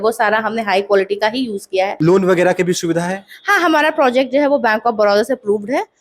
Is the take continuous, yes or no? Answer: no